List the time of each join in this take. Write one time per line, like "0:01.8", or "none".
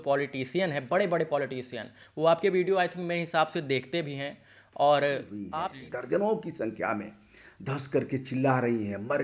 0:05.4